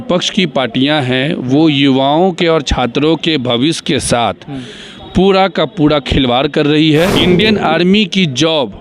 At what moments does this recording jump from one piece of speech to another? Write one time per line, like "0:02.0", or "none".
0:07.1